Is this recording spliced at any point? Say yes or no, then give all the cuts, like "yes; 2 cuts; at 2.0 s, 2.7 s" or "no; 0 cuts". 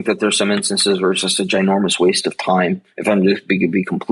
no; 0 cuts